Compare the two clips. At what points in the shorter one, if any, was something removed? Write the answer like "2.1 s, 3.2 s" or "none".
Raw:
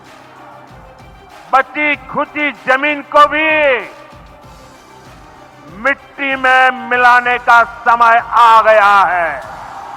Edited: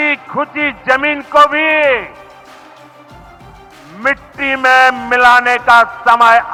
none